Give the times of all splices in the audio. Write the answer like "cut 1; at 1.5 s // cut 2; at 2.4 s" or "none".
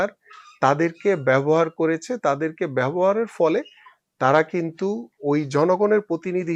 none

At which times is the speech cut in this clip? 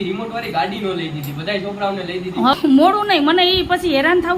cut 1; at 2.5 s

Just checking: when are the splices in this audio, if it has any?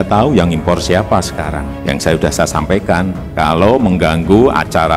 cut 1; at 1.8 s

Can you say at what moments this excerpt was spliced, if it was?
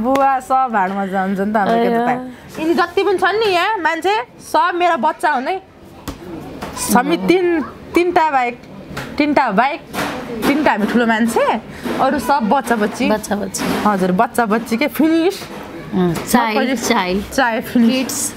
none

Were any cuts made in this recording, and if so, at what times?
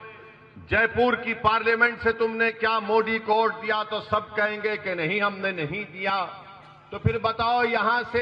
none

